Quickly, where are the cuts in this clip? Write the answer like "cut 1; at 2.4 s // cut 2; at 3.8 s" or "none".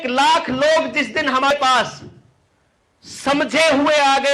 cut 1; at 1.5 s